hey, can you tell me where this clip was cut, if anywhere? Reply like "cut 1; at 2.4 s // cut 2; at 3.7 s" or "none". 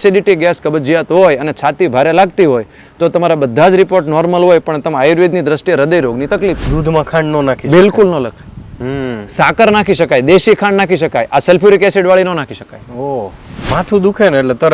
cut 1; at 6.7 s // cut 2; at 13.7 s